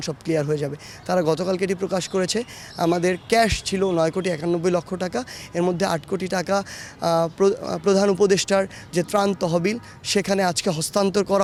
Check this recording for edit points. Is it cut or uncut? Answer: uncut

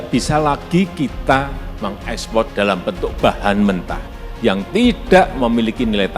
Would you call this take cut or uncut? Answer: cut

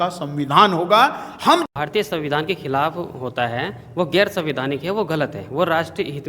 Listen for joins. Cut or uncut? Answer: cut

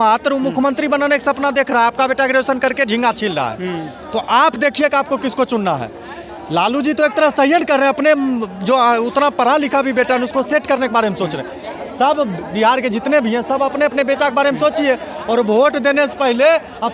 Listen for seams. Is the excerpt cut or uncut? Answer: uncut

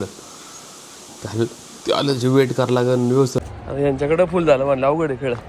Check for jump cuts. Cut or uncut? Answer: cut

